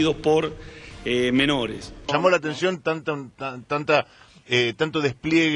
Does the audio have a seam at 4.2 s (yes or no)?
no